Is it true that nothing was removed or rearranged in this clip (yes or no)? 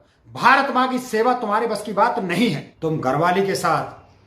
no